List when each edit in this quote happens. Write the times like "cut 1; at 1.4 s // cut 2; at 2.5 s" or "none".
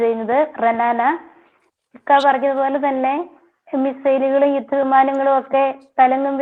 none